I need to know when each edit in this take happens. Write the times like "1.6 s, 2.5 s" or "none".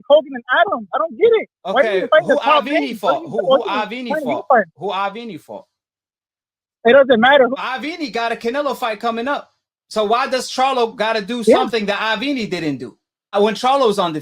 7.5 s, 13.3 s